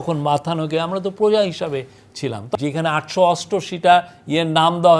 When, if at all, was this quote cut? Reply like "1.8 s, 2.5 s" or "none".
2.5 s